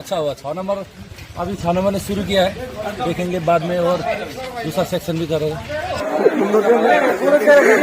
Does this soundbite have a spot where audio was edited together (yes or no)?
yes